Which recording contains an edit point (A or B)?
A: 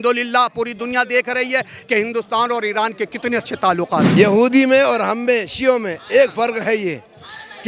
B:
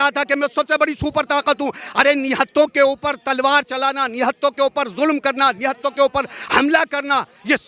A